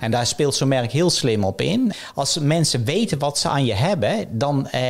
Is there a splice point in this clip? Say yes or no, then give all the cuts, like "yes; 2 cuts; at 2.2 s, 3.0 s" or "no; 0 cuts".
yes; 1 cut; at 1.9 s